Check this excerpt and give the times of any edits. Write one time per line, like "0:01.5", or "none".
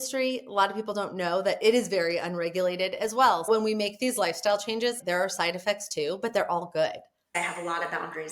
0:03.5
0:05.0
0:07.3

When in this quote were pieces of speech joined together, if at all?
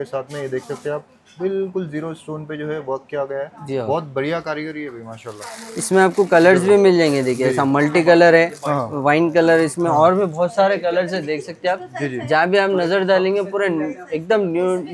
none

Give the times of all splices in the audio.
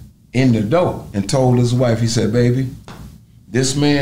0:01.1

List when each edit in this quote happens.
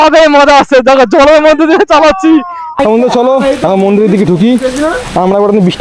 0:02.7

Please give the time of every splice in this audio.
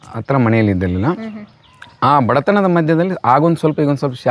none

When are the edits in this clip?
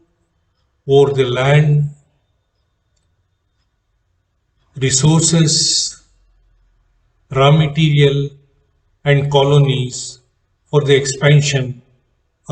none

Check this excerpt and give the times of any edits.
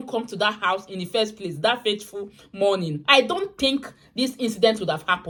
none

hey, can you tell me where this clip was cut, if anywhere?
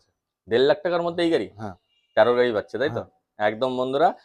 none

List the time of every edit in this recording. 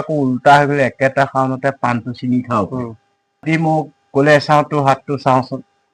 0:03.4

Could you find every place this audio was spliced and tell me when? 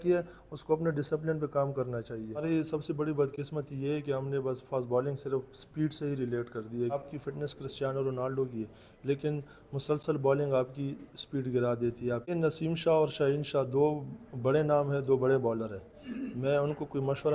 0:02.4
0:07.0
0:12.3

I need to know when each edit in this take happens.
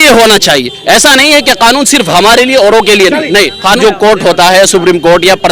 0:03.8

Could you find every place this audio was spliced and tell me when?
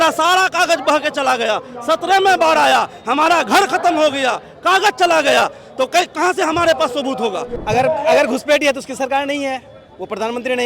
0:07.5

